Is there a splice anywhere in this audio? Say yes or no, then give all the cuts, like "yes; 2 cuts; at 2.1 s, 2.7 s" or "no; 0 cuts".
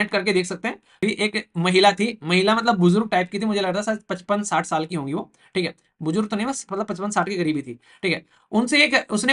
yes; 1 cut; at 1.0 s